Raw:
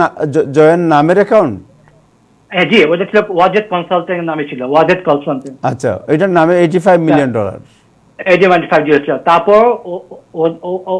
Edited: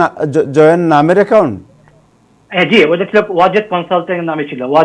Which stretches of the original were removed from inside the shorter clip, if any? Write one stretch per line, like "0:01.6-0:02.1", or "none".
none